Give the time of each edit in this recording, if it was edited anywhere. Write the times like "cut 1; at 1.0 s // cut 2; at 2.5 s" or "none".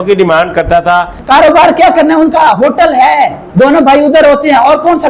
cut 1; at 1.1 s // cut 2; at 3.4 s